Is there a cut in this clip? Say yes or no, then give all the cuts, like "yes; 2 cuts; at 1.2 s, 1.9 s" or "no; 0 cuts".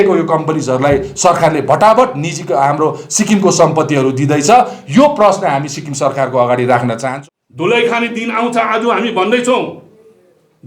yes; 1 cut; at 7.0 s